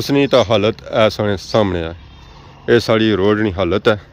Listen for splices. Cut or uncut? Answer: uncut